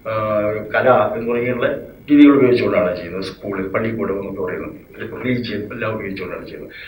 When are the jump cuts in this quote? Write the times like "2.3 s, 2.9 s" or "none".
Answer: none

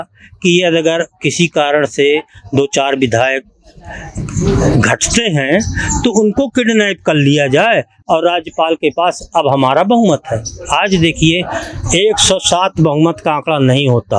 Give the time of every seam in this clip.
none

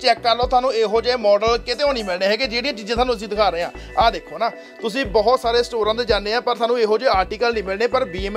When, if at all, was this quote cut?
none

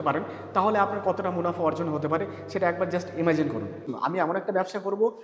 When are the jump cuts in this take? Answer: 3.9 s

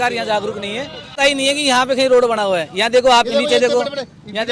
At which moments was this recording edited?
1.1 s

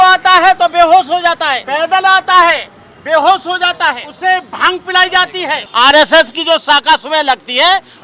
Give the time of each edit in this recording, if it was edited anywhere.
1.6 s, 4.1 s, 5.6 s

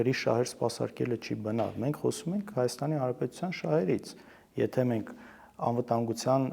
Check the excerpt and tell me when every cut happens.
none

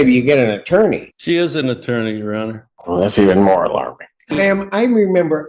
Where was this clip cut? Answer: 1.1 s, 2.7 s, 4.4 s

